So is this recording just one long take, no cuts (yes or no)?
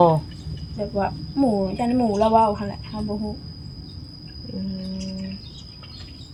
yes